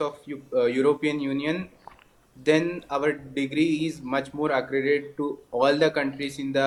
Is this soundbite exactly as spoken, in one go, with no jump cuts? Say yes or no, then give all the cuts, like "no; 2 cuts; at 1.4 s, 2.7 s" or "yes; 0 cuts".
yes; 0 cuts